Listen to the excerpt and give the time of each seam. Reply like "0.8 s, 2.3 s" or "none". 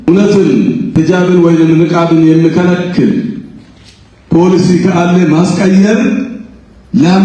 0.9 s